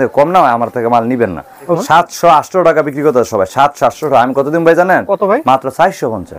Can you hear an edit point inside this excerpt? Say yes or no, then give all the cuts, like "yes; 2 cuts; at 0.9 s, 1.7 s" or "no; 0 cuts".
yes; 1 cut; at 1.8 s